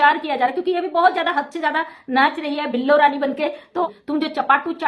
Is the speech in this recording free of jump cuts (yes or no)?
no